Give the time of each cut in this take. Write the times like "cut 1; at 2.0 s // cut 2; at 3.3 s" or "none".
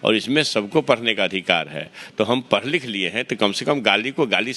none